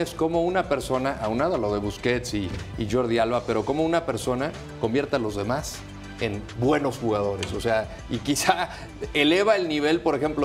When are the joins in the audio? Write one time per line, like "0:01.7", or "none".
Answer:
none